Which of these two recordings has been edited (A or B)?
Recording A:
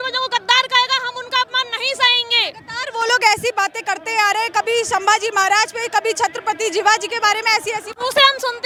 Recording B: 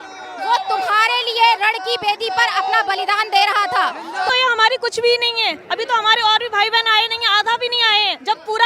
B